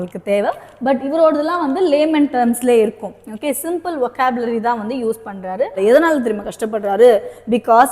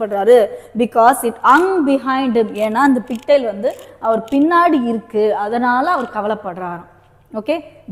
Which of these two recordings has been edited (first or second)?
first